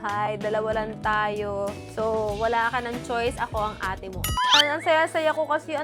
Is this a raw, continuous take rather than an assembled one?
no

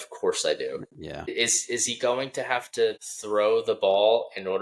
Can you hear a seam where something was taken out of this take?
yes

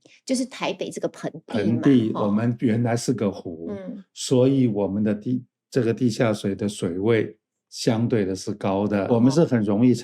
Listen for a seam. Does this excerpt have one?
yes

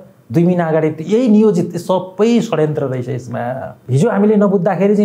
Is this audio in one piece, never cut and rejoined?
no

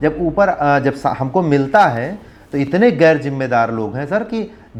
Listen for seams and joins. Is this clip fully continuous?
yes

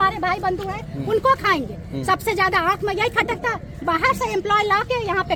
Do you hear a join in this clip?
no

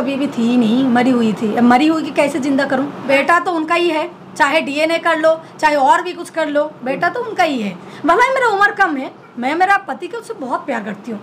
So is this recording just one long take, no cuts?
no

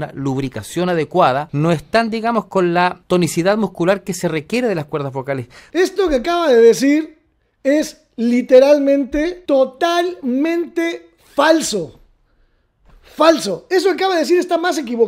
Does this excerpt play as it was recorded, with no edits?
no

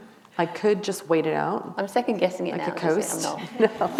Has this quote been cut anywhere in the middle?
no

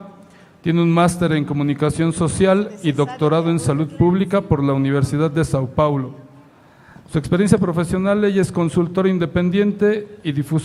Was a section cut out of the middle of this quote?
no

